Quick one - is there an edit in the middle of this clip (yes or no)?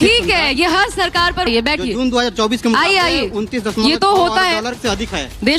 yes